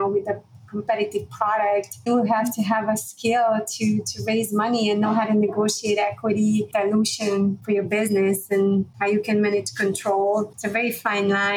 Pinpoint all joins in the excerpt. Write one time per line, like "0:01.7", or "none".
0:02.1
0:06.7
0:07.6
0:08.9
0:10.6